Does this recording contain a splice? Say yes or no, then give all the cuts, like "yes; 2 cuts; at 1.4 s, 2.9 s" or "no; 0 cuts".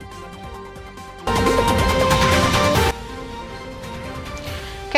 yes; 1 cut; at 1.2 s